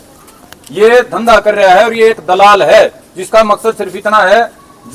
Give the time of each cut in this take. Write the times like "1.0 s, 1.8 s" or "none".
none